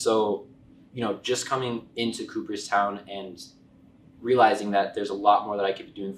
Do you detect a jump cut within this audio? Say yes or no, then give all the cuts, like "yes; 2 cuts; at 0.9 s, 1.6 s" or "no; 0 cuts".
no; 0 cuts